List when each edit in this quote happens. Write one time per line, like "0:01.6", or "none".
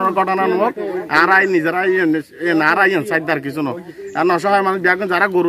none